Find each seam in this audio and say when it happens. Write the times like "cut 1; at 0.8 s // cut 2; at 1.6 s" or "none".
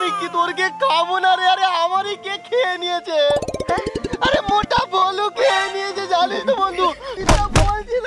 cut 1; at 7.1 s